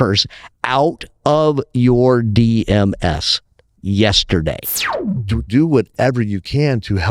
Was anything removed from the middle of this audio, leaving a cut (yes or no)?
yes